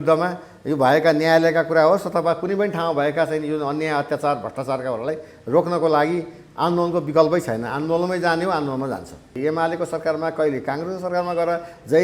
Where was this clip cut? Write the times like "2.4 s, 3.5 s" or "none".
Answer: 9.4 s